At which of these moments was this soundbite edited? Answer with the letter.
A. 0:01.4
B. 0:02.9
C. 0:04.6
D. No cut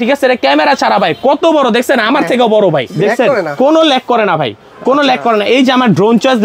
B